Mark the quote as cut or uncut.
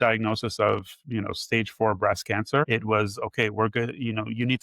cut